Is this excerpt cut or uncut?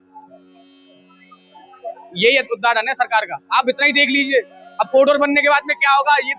uncut